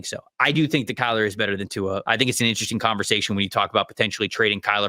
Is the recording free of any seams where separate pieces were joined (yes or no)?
no